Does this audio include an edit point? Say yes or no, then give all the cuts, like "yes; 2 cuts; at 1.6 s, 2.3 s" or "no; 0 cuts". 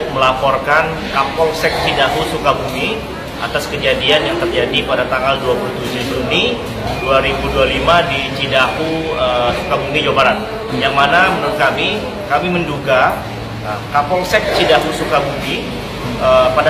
no; 0 cuts